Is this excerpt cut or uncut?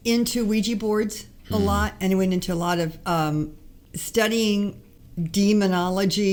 uncut